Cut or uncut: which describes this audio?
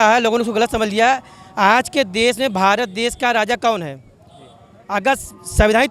uncut